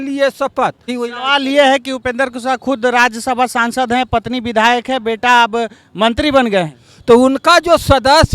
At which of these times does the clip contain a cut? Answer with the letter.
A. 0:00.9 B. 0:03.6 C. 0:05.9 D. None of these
A